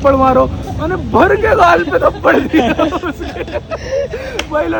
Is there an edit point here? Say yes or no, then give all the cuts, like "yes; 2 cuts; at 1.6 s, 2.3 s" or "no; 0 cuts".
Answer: no; 0 cuts